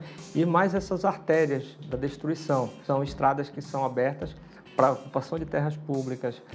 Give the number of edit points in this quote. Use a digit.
1